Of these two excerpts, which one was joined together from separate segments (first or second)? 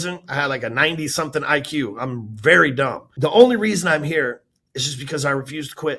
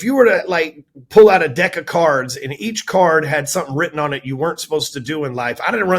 first